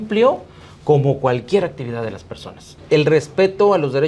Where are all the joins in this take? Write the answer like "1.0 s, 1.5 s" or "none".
2.7 s